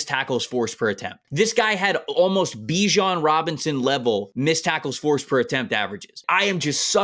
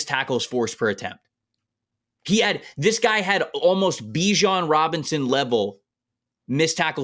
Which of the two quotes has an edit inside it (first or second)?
first